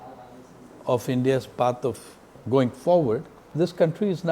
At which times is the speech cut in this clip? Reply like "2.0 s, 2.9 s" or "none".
2.4 s, 3.4 s